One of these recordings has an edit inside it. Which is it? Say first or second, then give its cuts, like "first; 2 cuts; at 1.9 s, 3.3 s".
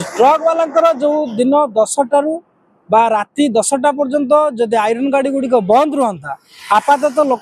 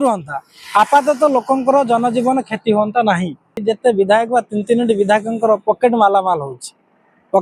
second; 1 cut; at 3.6 s